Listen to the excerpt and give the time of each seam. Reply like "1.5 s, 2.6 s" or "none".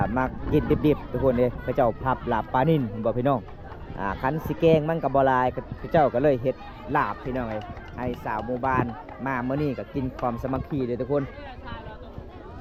none